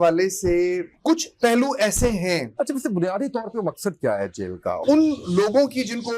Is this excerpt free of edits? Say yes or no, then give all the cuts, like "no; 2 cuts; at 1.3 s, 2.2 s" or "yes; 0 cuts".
no; 3 cuts; at 0.9 s, 2.5 s, 4.8 s